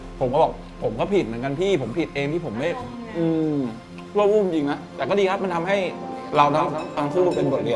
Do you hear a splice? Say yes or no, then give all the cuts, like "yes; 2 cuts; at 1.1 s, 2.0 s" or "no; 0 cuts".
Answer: yes; 1 cut; at 4.9 s